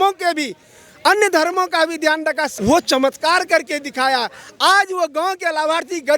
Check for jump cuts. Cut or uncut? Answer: cut